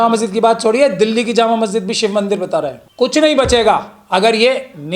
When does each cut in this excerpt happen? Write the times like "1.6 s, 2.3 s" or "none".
2.8 s